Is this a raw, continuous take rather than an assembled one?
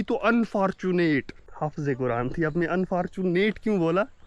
no; 1 cut; at 1.4 s

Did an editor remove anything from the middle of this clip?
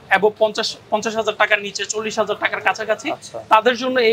no; 0 cuts

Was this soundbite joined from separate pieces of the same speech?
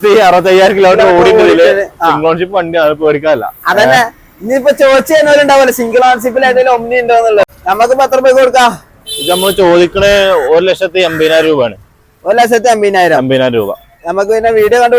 yes; 1 cut; at 7.5 s

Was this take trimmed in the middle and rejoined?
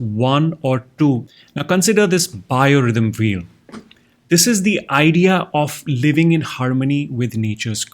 yes; 1 cut; at 1.3 s

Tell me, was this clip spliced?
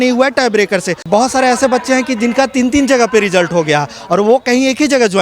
yes; 1 cut; at 1.0 s

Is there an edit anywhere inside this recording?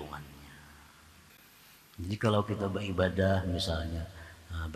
yes; 1 cut; at 1.3 s

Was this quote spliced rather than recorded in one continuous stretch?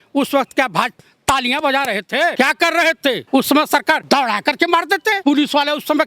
yes; 5 cuts; at 1.1 s, 2.3 s, 3.2 s, 4.0 s, 5.2 s

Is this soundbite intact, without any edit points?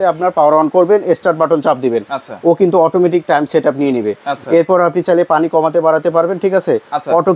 yes; 0 cuts

